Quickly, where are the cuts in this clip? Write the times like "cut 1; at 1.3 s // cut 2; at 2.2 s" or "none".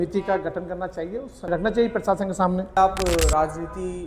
cut 1; at 1.4 s // cut 2; at 2.8 s

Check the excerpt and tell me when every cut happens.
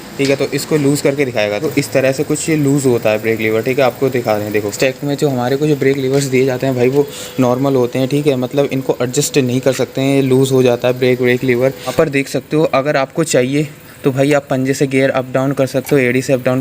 cut 1; at 1.6 s // cut 2; at 4.7 s // cut 3; at 11.8 s

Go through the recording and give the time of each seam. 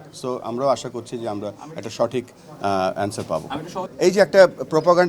cut 1; at 3.8 s

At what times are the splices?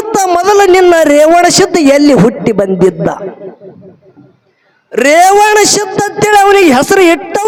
none

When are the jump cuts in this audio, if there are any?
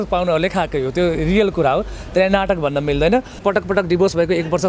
cut 1; at 3.4 s

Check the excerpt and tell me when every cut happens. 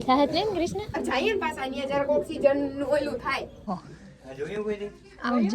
cut 1; at 1.0 s // cut 2; at 3.7 s

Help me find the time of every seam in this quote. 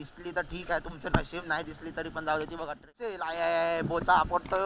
cut 1; at 3.2 s

